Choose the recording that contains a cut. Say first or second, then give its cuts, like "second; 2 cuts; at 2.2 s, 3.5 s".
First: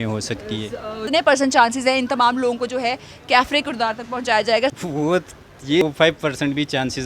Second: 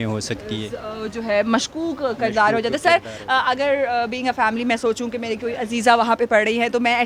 first; 3 cuts; at 1.0 s, 4.8 s, 5.8 s